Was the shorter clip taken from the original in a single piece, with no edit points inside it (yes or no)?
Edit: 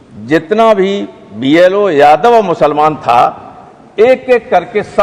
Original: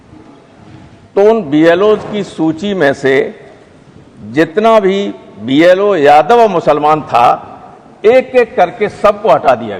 yes